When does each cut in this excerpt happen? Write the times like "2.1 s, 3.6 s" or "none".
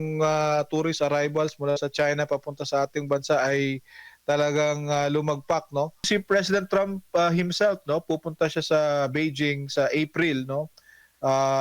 6.0 s